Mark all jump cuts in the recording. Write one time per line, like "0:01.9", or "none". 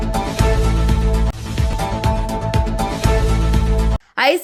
none